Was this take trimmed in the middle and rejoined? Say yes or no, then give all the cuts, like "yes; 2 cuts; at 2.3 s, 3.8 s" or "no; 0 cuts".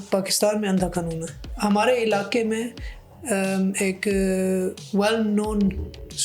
no; 0 cuts